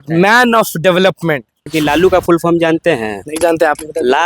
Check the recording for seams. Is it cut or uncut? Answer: cut